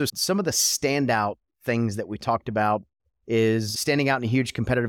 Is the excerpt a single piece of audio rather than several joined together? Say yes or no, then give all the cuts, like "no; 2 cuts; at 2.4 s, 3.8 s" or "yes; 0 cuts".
no; 1 cut; at 3.7 s